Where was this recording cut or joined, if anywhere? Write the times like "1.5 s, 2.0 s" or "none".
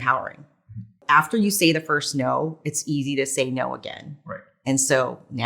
1.0 s